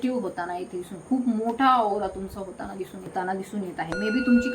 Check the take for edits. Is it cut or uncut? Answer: cut